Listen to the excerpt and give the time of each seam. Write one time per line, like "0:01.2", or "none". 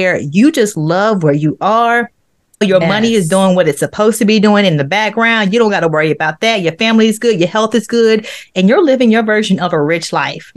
0:02.6